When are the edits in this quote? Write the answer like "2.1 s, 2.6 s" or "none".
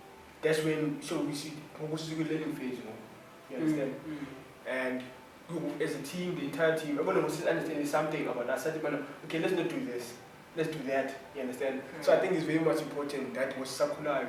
none